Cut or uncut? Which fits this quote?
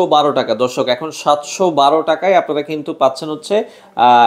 uncut